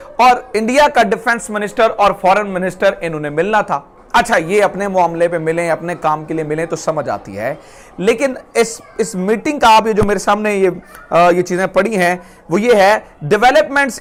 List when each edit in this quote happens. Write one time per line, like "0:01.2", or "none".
none